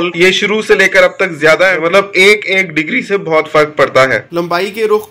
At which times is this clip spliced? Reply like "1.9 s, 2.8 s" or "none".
1.8 s, 4.3 s